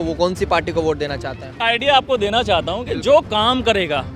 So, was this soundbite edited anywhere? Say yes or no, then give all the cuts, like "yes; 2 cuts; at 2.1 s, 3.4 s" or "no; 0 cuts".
yes; 1 cut; at 1.6 s